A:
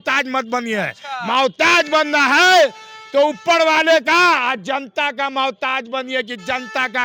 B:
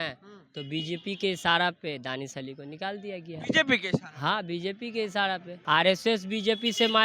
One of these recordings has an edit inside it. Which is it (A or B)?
B